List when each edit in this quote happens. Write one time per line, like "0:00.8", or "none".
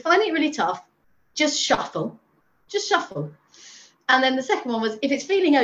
none

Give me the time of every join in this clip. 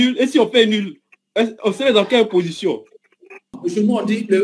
0:03.5

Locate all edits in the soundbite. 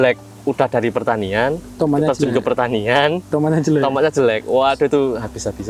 none

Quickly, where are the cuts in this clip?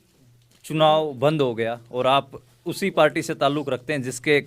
none

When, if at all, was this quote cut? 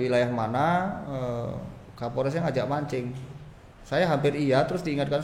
none

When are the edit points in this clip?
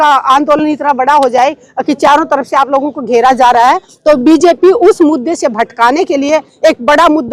none

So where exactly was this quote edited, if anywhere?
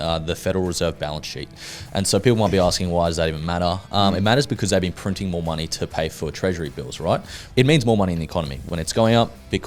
0:07.4
0:08.6

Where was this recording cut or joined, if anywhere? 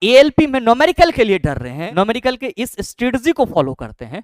0:01.8

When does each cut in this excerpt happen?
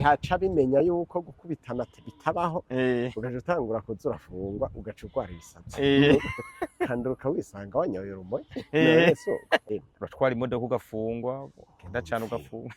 0:09.6

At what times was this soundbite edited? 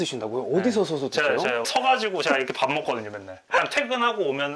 0:01.7
0:03.6

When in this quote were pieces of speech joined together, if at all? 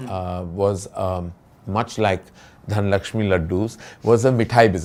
none

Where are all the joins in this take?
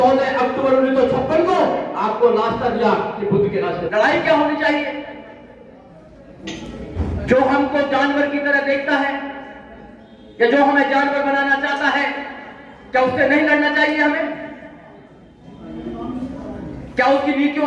0:03.9

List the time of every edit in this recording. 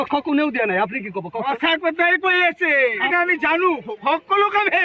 0:03.0

